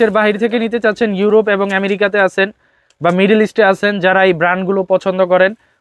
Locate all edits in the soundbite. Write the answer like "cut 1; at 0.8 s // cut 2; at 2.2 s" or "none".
none